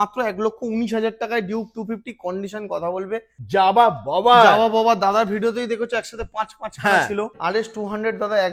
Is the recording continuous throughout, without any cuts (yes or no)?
no